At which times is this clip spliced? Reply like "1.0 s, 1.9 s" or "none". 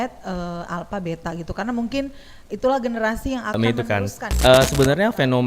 3.6 s